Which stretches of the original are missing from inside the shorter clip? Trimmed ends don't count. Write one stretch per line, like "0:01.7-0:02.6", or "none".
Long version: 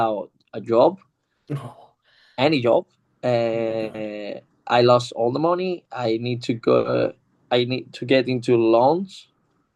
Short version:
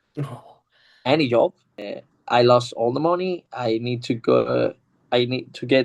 0:03.0-0:04.1